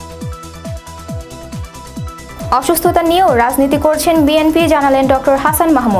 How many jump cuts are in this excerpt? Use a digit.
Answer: 0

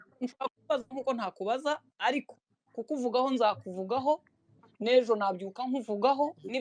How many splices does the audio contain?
0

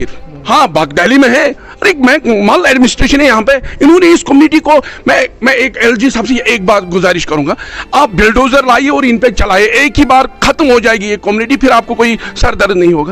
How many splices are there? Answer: 0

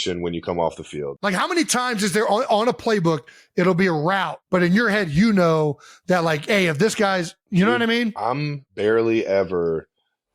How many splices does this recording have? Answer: 4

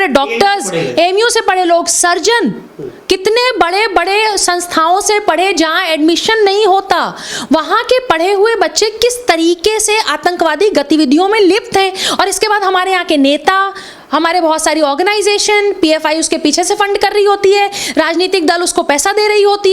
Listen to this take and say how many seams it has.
0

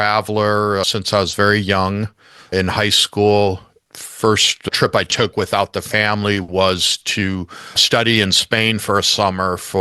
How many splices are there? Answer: 0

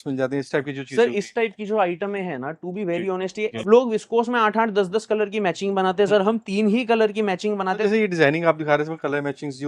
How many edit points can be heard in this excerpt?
2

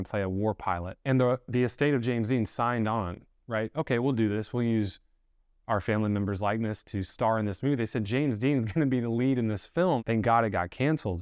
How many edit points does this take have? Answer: 2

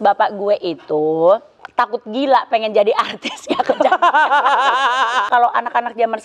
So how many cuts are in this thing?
2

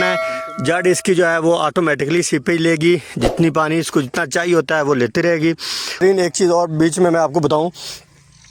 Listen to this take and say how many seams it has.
1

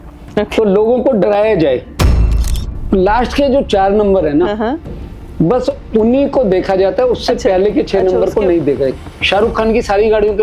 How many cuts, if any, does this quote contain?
2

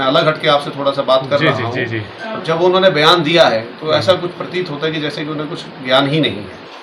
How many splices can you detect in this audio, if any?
0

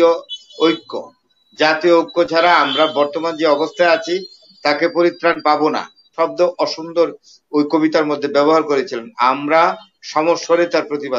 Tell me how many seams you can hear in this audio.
1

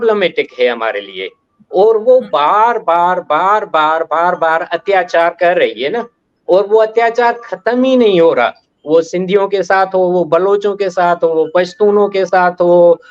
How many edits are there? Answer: 0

